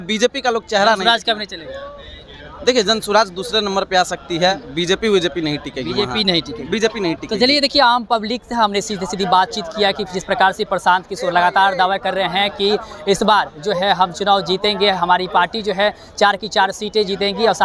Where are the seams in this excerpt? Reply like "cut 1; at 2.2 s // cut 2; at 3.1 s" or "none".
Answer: none